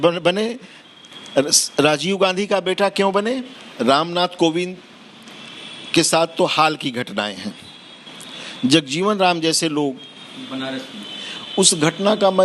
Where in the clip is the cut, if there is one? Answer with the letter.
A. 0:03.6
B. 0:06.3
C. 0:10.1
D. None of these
A